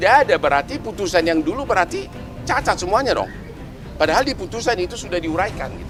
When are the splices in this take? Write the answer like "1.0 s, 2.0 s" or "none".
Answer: none